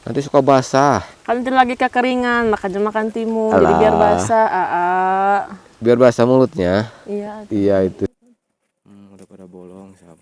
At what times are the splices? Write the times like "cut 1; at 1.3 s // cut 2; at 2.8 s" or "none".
cut 1; at 8.1 s